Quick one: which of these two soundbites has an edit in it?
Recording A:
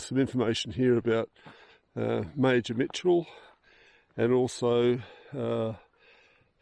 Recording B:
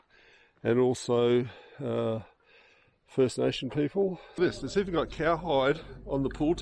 B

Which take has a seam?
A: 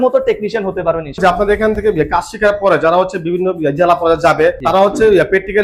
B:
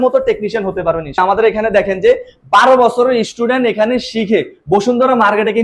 B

